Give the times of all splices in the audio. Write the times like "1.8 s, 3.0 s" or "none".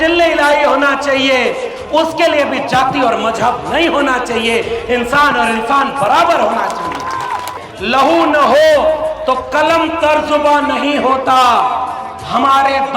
7.5 s